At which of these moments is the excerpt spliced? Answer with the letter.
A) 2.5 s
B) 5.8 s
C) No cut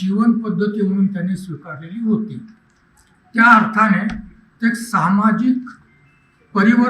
C